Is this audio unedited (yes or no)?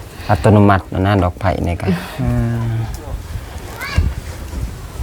yes